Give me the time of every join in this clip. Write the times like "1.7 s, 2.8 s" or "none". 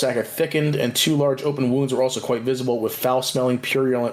none